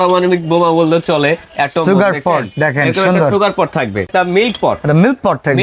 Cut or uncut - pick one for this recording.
cut